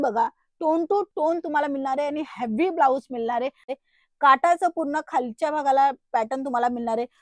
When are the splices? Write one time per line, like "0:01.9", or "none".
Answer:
0:03.7